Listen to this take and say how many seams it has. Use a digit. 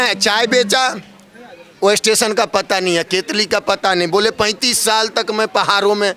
0